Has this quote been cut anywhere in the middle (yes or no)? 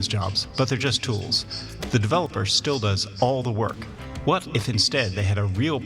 no